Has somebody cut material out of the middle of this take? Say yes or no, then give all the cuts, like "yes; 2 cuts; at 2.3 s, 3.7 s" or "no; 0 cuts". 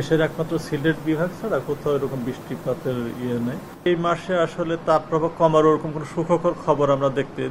yes; 1 cut; at 3.7 s